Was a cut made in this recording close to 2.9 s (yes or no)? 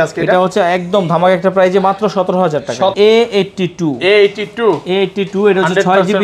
yes